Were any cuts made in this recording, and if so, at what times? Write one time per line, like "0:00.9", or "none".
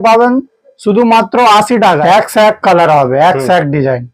0:02.0